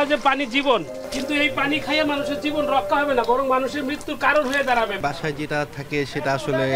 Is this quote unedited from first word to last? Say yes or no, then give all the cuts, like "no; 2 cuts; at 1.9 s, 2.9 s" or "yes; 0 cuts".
no; 2 cuts; at 1.0 s, 5.0 s